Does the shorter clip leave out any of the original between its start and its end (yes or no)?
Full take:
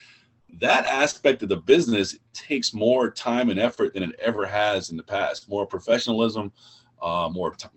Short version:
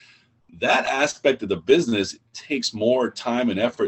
no